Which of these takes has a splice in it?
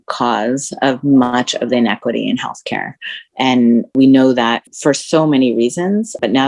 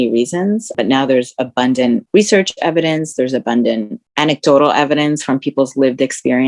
second; 1 cut; at 2.0 s

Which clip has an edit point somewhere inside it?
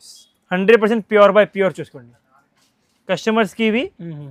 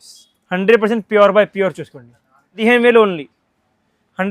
second; 1 cut; at 2.6 s

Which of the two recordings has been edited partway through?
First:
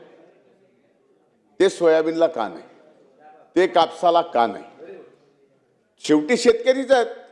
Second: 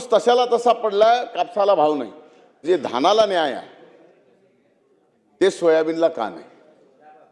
second; 1 cut; at 2.5 s

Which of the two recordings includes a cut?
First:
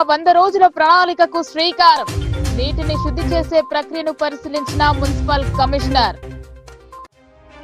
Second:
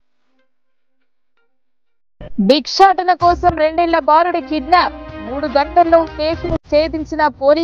second; 1 cut; at 2.0 s

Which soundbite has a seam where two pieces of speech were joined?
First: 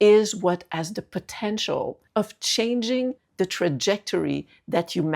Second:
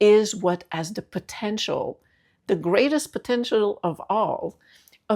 first; 2 cuts; at 2.0 s, 3.2 s

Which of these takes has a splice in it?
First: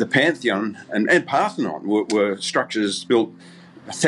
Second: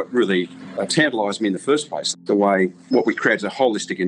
second; 2 cuts; at 2.1 s, 2.9 s

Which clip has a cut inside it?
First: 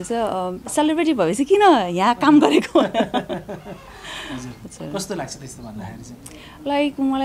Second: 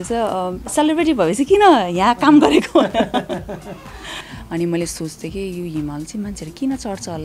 second; 1 cut; at 4.2 s

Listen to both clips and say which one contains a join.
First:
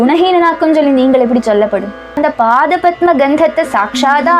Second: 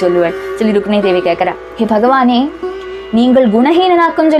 first; 1 cut; at 2.2 s

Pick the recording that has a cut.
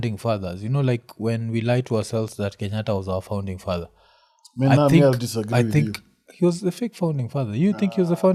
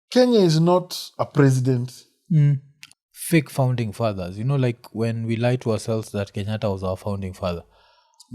second; 1 cut; at 2.7 s

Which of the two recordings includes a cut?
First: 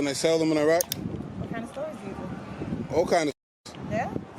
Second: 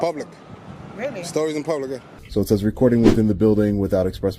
second; 1 cut; at 2.1 s

